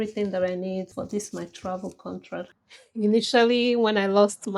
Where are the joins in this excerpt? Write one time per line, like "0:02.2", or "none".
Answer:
0:02.5